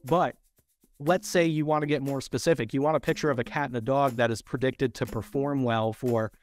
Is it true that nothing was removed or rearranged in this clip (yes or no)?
yes